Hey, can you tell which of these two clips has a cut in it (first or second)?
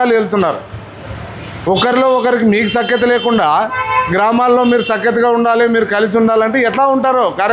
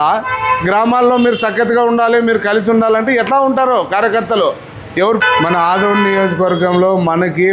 second